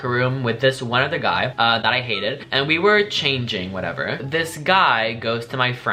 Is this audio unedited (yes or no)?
yes